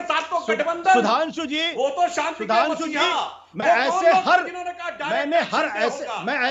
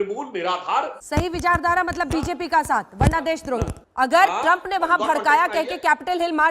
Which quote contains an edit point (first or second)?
second